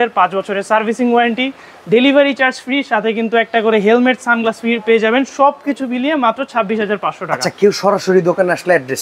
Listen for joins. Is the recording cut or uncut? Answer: uncut